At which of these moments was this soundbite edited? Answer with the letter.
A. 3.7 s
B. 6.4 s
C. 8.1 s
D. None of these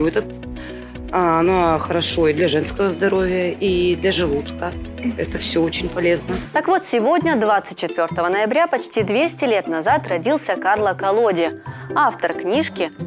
B